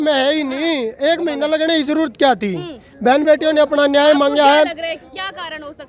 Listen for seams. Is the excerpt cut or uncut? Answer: uncut